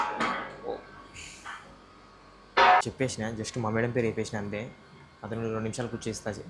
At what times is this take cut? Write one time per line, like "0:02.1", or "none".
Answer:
none